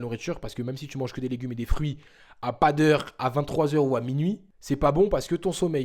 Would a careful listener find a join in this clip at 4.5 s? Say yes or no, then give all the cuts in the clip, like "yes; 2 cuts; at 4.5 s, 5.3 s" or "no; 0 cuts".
yes; 1 cut; at 4.5 s